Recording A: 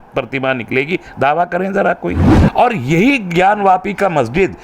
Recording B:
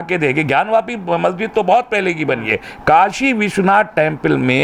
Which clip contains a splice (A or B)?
A